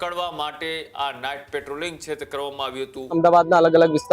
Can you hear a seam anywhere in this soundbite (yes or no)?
yes